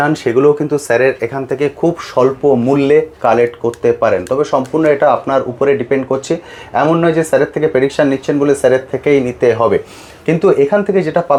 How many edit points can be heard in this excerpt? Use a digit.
0